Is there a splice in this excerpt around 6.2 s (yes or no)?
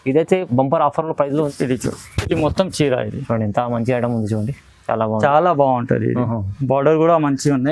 no